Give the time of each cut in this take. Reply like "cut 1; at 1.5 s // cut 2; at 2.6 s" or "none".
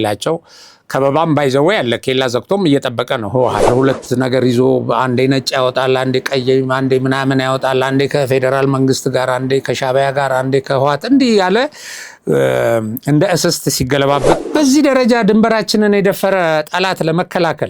cut 1; at 3.7 s // cut 2; at 14.4 s